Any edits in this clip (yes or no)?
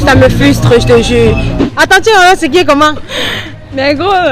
yes